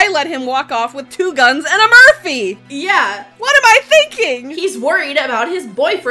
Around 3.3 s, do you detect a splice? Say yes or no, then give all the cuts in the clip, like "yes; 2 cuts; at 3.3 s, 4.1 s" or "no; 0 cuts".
yes; 1 cut; at 3.3 s